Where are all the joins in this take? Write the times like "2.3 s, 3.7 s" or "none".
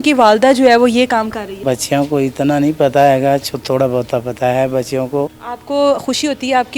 1.6 s, 5.5 s